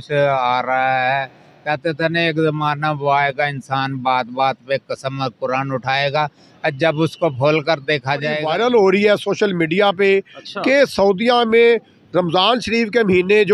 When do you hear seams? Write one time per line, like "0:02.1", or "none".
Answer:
0:08.4